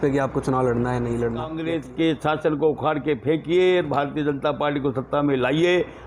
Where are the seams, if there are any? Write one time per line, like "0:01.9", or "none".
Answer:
0:01.6